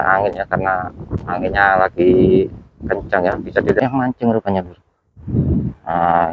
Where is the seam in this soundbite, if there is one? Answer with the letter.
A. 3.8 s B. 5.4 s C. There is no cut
A